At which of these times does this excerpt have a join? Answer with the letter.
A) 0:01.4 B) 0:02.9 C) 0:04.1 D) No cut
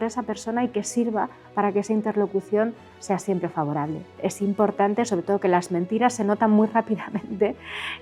C